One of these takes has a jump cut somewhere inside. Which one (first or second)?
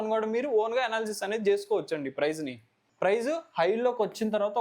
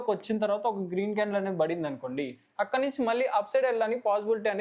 first